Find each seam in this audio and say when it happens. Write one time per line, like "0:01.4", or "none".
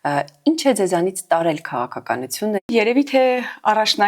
0:02.7